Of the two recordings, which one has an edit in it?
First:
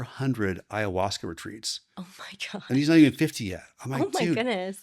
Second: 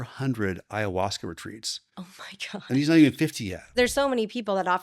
second; 1 cut; at 3.8 s

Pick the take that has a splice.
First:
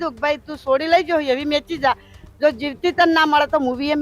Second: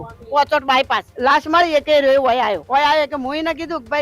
second; 2 cuts; at 1.1 s, 2.6 s

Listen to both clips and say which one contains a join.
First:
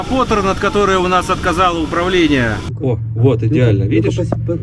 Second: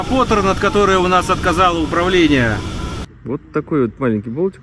second; 1 cut; at 2.7 s

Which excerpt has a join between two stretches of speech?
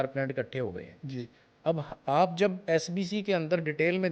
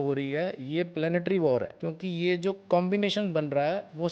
second; 1 cut; at 1.8 s

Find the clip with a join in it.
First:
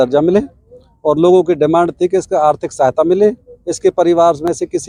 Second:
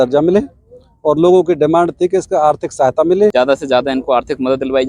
second; 1 cut; at 3.3 s

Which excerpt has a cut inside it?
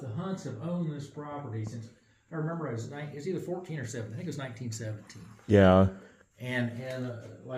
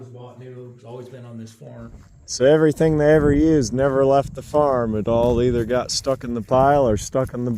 second; 1 cut; at 1.9 s

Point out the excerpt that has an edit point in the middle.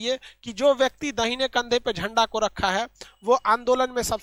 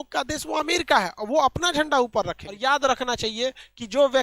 second; 1 cut; at 2.4 s

